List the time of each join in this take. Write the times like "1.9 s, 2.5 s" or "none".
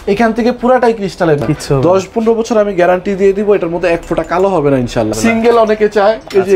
1.4 s, 5.1 s